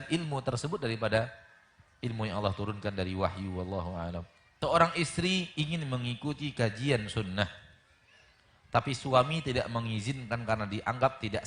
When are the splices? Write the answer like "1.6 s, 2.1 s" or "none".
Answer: 4.4 s